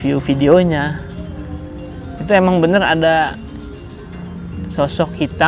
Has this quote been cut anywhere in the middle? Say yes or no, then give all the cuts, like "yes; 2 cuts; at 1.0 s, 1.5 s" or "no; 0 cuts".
no; 0 cuts